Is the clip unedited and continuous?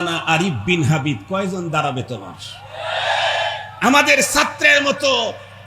yes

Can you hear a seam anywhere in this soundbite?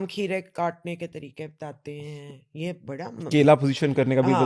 no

